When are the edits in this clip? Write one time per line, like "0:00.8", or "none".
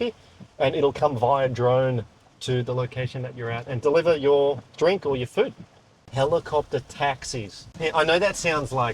0:06.1
0:07.8